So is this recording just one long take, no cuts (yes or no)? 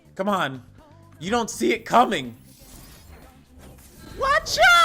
yes